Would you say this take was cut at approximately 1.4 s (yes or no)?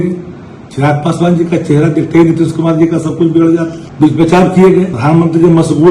no